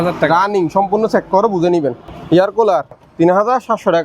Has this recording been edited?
yes; 2 cuts; at 2.1 s, 3.0 s

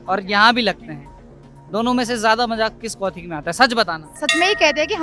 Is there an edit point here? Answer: yes; 1 cut; at 4.1 s

